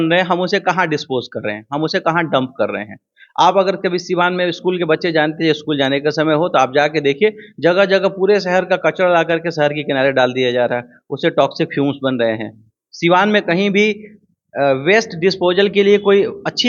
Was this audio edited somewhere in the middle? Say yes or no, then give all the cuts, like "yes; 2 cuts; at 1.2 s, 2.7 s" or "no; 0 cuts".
no; 0 cuts